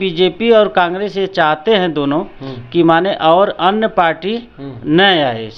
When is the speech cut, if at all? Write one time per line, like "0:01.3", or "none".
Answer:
none